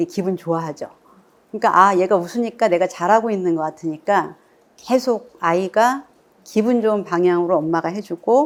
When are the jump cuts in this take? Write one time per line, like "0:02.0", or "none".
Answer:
none

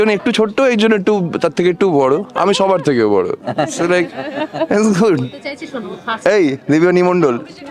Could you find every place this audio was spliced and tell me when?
0:06.1

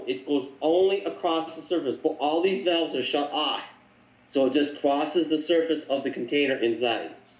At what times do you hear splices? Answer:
none

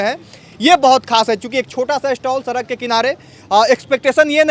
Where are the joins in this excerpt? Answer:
none

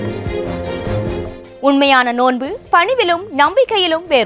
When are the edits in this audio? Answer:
0:01.4

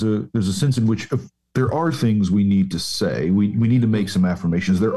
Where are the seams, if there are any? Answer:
none

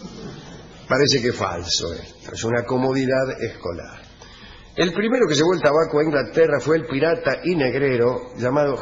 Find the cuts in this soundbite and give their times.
0:05.9

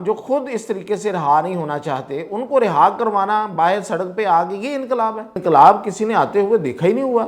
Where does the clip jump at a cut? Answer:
0:05.4

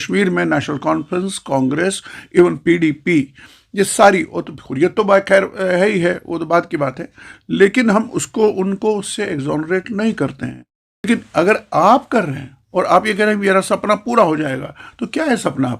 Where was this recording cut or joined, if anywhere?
none

